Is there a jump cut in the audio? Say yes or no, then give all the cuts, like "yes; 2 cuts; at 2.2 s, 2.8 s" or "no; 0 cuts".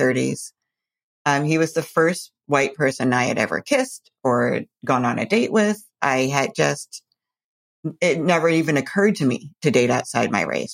no; 0 cuts